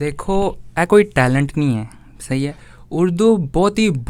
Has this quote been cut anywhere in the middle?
no; 0 cuts

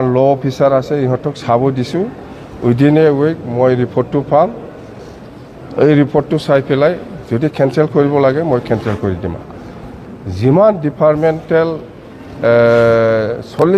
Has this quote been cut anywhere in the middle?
yes; 1 cut; at 9.5 s

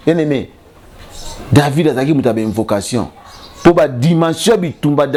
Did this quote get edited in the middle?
no; 0 cuts

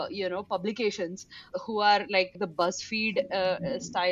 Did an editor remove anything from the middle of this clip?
yes; 2 cuts; at 1.4 s, 2.4 s

